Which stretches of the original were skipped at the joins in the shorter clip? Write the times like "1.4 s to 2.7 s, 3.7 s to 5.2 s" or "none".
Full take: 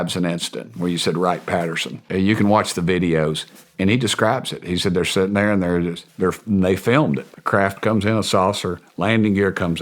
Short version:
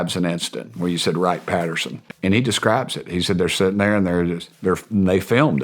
1.9 s to 3.5 s